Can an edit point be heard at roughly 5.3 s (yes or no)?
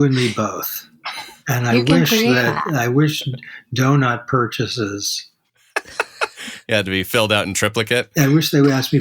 no